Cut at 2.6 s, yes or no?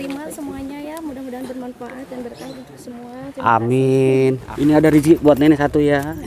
no